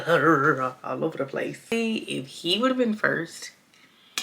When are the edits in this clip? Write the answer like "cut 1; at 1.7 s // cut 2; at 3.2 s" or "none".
cut 1; at 1.7 s

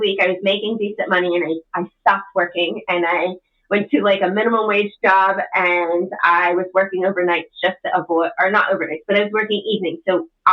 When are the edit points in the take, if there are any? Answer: none

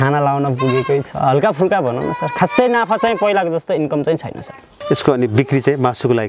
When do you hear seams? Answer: cut 1; at 4.7 s

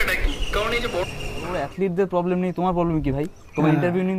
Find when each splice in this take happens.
cut 1; at 1.5 s

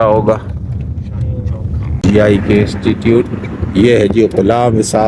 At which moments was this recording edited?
cut 1; at 2.0 s

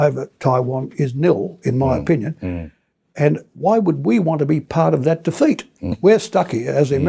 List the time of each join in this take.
cut 1; at 5.9 s

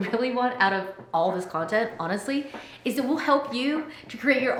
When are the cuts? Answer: none

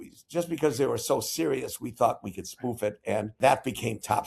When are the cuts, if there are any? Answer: cut 1; at 3.3 s

